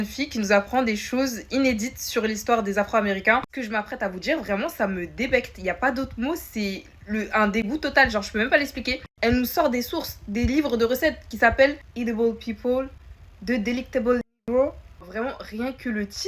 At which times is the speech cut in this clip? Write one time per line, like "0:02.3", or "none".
0:03.6
0:09.0